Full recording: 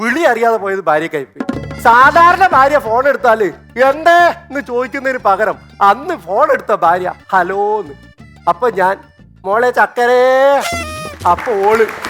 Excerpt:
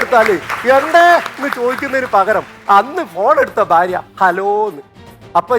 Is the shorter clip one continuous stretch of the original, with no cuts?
yes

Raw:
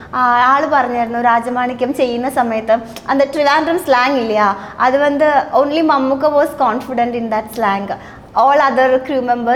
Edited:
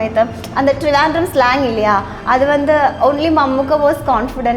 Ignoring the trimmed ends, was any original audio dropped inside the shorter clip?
no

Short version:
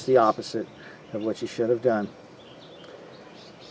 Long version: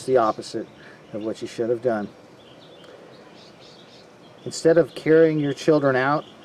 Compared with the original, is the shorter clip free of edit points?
yes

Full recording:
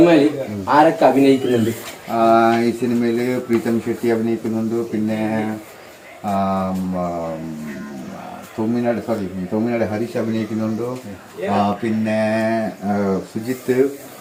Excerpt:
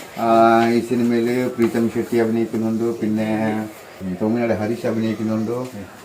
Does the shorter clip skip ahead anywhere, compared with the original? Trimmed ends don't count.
yes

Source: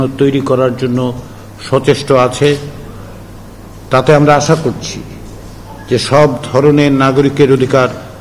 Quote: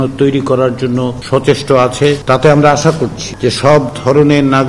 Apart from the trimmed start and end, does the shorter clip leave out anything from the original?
yes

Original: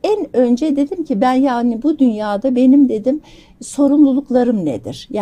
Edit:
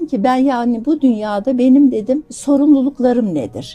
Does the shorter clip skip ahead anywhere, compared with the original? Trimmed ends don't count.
yes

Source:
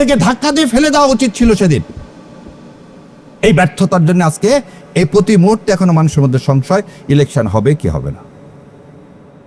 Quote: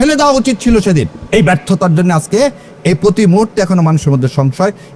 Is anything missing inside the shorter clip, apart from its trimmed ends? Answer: yes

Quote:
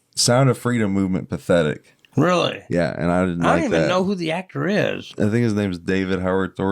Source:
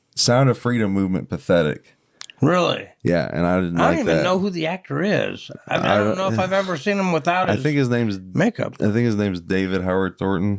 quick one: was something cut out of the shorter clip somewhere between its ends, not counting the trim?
yes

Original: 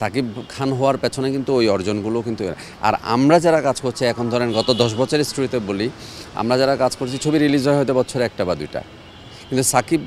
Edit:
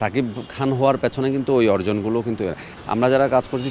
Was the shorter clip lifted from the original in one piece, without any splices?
no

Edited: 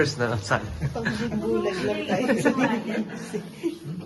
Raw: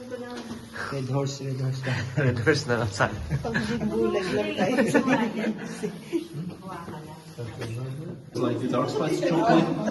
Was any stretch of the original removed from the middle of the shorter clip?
no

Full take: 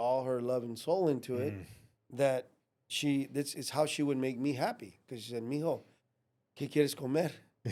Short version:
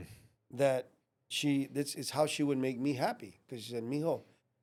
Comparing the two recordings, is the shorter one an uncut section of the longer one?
yes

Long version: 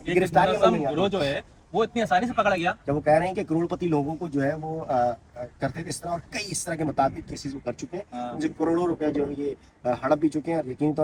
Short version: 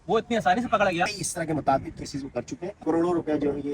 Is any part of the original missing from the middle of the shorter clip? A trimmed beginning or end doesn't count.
yes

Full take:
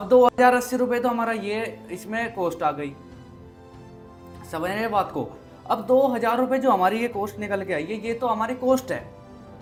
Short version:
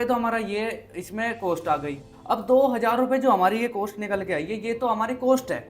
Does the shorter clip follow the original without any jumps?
no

